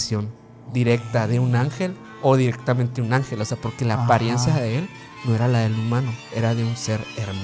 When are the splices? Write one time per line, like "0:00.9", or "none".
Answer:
none